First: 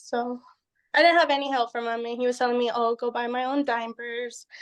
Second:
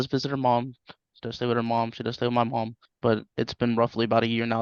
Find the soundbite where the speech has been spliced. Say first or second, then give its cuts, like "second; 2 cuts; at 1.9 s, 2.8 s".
second; 1 cut; at 2.8 s